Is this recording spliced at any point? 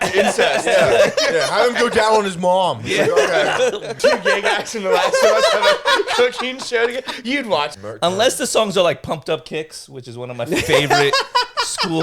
yes; 2 cuts; at 4.0 s, 7.7 s

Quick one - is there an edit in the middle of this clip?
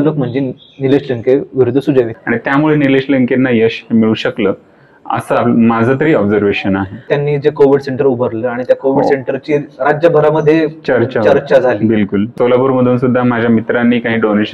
yes; 3 cuts; at 2.2 s, 7.1 s, 12.3 s

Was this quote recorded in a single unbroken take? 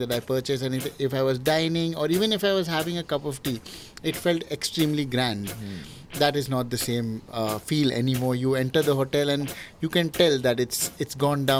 yes; 0 cuts

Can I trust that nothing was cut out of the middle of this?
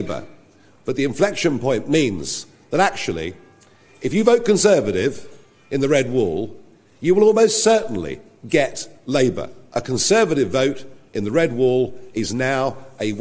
no; 1 cut; at 9.5 s

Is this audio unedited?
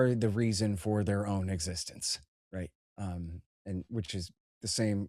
yes; 0 cuts

